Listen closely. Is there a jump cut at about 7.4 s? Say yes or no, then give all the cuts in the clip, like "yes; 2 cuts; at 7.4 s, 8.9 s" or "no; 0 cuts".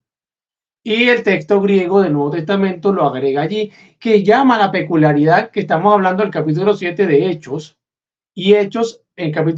no; 0 cuts